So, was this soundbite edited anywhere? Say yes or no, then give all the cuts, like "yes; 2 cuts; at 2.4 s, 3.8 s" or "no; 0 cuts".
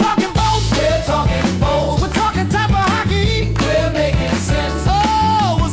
no; 0 cuts